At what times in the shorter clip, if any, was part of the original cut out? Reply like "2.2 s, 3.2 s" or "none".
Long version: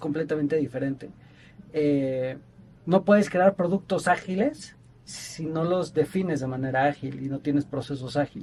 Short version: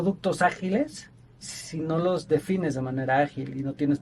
none